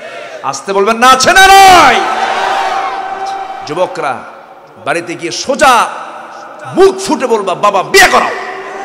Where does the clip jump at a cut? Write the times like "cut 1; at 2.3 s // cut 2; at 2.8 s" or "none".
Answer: cut 1; at 3.7 s